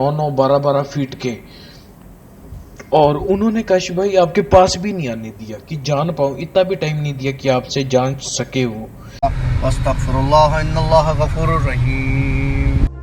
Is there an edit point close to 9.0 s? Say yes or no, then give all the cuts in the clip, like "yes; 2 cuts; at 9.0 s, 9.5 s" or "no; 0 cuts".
yes; 1 cut; at 9.0 s